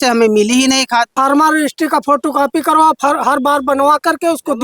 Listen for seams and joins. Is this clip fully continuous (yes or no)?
no